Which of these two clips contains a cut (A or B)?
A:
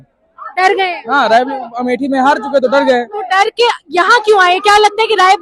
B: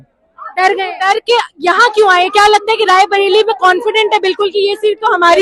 B